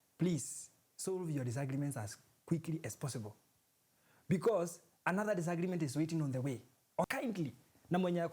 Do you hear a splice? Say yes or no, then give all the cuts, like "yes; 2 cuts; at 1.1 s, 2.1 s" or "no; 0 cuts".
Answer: yes; 1 cut; at 7.0 s